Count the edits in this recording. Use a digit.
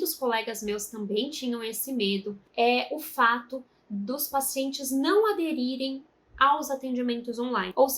1